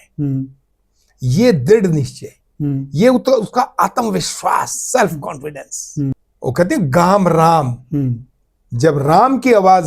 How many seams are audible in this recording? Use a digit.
1